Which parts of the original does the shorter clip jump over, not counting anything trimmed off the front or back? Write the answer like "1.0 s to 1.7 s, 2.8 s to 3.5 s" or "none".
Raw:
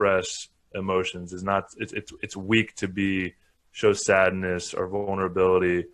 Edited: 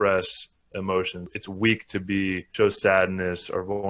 1.3 s to 2.1 s, 3.3 s to 3.7 s